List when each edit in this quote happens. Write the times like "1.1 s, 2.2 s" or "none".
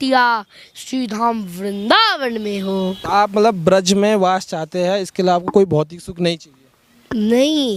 none